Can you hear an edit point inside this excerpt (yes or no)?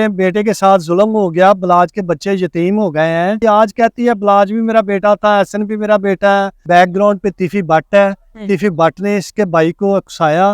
yes